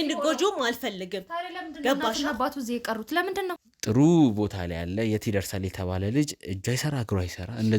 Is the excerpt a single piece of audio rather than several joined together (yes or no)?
no